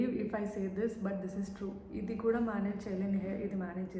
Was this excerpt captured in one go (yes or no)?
yes